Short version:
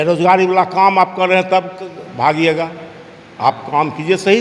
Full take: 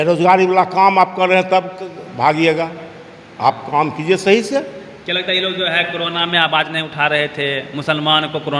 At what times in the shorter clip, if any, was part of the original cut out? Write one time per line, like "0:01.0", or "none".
none